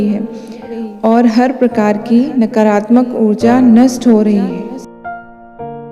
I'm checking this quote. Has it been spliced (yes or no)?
yes